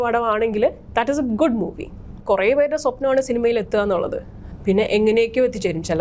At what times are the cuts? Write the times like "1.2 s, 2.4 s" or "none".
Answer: 2.1 s